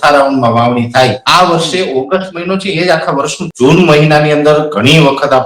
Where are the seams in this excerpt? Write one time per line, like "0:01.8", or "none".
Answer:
0:01.2
0:03.4

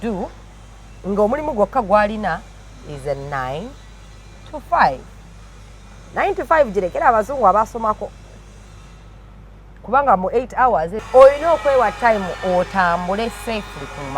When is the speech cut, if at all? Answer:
0:11.0

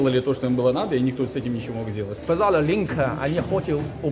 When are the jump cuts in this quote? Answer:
0:02.2

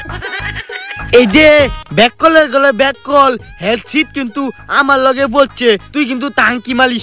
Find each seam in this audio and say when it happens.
none

